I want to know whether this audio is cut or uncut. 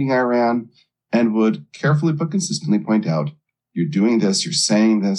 uncut